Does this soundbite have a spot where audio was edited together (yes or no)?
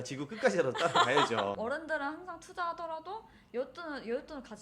yes